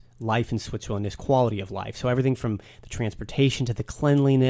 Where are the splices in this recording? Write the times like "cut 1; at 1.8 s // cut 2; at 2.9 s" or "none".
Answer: none